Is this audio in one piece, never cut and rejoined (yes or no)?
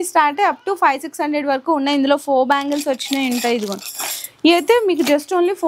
yes